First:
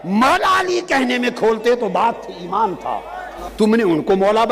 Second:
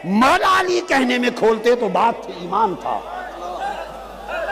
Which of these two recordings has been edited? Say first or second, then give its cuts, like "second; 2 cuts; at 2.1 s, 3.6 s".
first; 1 cut; at 3.4 s